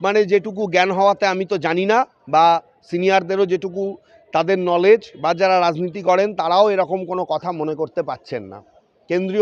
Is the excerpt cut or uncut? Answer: uncut